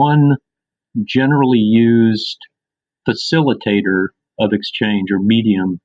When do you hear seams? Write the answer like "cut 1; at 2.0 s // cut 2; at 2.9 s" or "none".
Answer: none